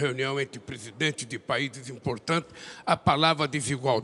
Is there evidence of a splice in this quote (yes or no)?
no